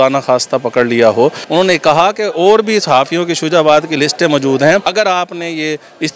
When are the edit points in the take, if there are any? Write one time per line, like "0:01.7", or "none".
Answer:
0:01.4
0:04.9